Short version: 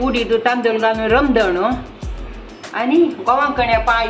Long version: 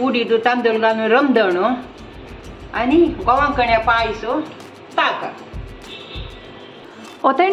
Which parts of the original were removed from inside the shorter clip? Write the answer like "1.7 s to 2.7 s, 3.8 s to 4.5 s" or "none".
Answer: none